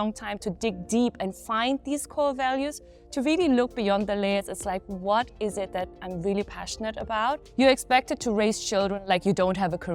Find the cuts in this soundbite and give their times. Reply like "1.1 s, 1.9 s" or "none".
7.4 s